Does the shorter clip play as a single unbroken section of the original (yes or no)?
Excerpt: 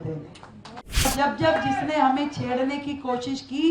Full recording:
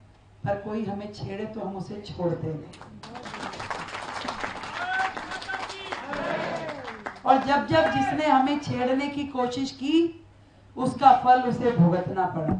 no